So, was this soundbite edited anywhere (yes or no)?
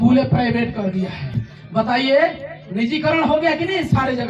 no